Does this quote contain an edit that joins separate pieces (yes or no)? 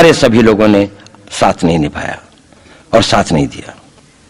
no